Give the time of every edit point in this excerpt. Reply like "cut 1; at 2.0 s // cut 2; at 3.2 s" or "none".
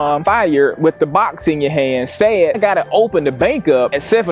cut 1; at 2.6 s